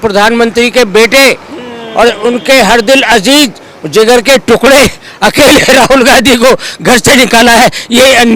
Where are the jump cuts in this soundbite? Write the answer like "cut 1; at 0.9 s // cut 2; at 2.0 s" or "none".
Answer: none